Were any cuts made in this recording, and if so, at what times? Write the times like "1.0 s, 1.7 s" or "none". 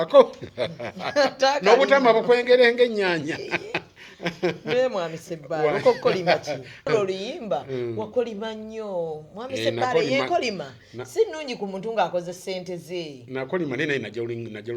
6.9 s